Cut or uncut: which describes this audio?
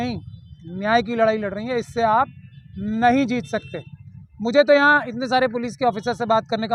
uncut